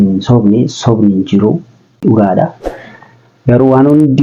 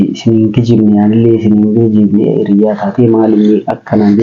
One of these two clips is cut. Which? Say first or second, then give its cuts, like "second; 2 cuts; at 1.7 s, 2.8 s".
first; 1 cut; at 2.0 s